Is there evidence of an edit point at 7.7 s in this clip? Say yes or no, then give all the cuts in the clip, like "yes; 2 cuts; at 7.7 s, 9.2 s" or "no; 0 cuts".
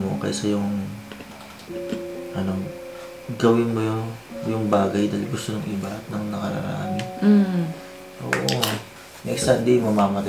no; 1 cut; at 8.9 s